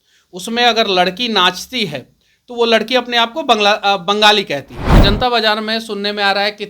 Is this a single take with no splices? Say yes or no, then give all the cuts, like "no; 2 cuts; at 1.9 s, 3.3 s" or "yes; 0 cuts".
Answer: no; 1 cut; at 5.0 s